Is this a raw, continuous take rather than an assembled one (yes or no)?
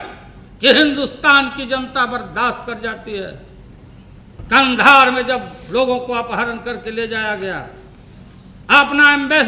yes